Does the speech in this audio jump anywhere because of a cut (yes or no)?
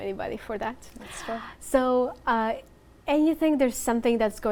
no